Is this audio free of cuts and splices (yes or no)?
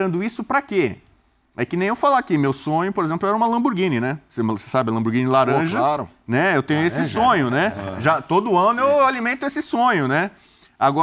yes